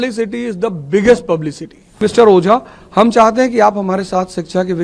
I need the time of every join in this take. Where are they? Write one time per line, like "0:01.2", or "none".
0:02.0